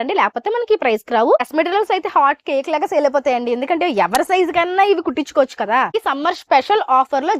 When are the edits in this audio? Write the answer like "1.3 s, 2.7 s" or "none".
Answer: 1.5 s, 5.9 s